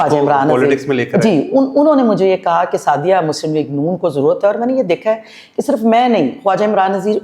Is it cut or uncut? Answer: uncut